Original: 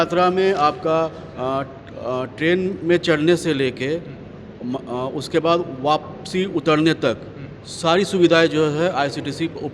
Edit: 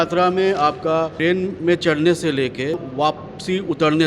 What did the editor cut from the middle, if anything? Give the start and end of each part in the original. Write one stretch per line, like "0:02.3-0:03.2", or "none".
0:01.1-0:02.4
0:04.1-0:05.7